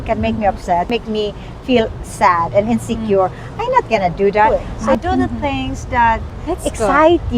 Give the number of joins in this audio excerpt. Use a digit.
3